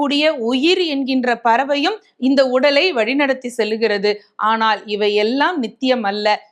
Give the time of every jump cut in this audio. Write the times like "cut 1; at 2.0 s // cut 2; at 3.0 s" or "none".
none